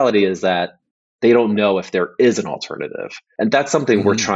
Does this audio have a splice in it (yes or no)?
no